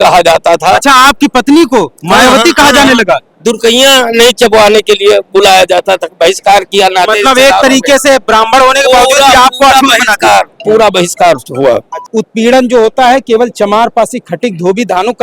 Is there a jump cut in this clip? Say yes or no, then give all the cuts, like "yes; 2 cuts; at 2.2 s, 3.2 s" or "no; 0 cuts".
yes; 1 cut; at 12.0 s